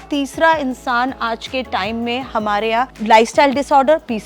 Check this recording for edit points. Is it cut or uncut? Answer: cut